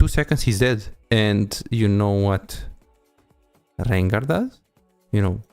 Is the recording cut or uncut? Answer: cut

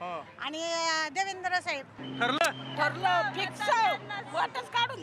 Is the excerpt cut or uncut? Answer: cut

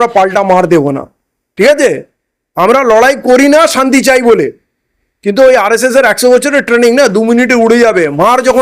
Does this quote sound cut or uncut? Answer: uncut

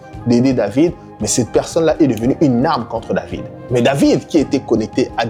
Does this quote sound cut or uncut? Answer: uncut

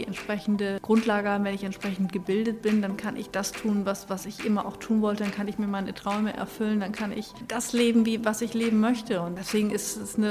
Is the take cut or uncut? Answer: cut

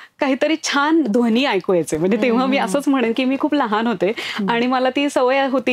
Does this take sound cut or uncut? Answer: uncut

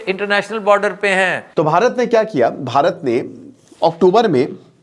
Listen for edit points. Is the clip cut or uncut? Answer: cut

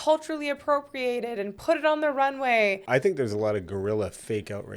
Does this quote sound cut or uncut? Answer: cut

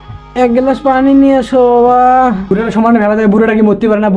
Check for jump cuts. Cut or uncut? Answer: cut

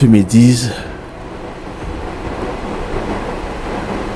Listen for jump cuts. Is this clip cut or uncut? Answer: uncut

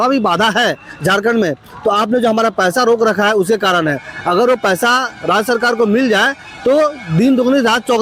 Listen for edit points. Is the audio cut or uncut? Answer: uncut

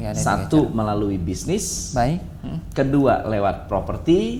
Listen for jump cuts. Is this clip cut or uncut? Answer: uncut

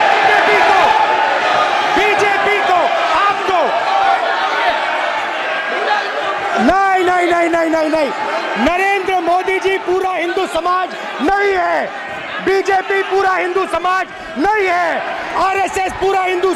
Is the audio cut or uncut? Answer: uncut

